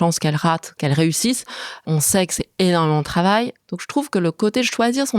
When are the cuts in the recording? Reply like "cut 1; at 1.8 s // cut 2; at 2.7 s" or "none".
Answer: cut 1; at 0.8 s // cut 2; at 1.8 s // cut 3; at 3.6 s